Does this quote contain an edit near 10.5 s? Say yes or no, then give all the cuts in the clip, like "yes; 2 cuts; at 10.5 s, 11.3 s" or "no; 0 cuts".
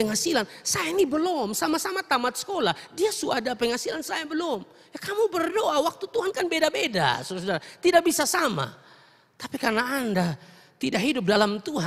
no; 0 cuts